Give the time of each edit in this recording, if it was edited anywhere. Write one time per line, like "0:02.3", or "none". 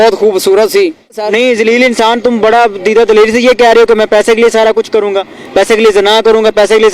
0:01.2